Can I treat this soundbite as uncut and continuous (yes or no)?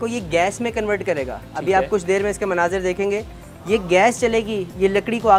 yes